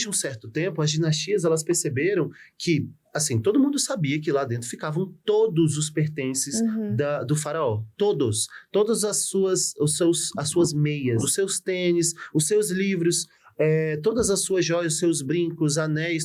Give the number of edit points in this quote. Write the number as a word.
one